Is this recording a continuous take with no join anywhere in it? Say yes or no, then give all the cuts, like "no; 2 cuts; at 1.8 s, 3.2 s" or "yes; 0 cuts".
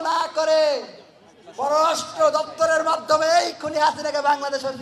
yes; 0 cuts